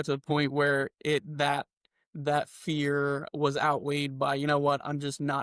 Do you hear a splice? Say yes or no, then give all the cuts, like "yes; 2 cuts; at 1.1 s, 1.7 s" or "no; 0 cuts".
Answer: no; 0 cuts